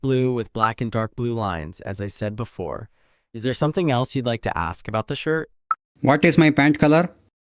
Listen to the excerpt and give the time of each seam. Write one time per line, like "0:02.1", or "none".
none